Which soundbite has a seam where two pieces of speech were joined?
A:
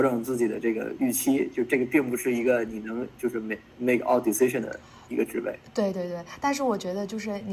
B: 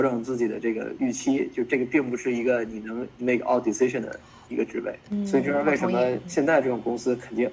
B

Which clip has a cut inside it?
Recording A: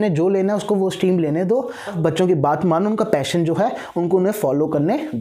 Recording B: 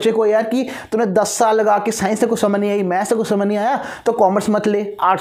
A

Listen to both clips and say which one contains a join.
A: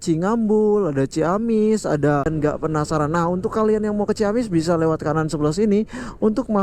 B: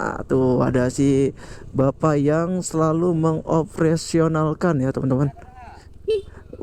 A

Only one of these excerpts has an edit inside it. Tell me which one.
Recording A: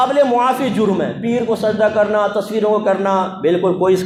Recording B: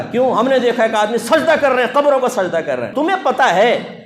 B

